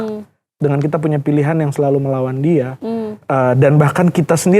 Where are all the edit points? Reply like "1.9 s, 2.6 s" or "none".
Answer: 3.1 s